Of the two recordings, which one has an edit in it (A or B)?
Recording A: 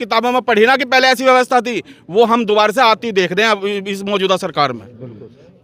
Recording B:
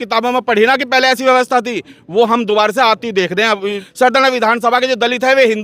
B